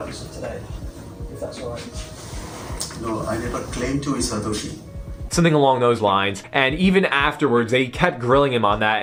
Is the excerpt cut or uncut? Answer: uncut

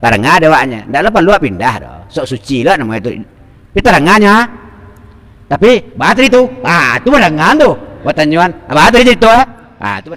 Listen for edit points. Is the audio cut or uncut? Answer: uncut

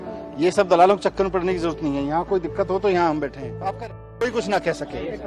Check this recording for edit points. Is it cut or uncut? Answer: cut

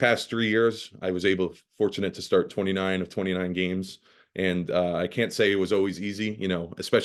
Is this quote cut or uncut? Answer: uncut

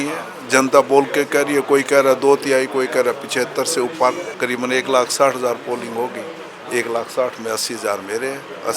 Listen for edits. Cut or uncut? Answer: cut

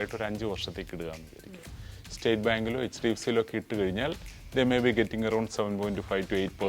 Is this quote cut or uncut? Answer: uncut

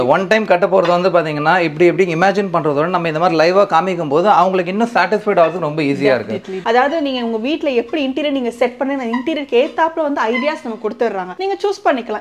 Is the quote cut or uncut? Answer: uncut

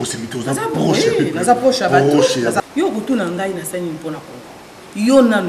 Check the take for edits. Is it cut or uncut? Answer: cut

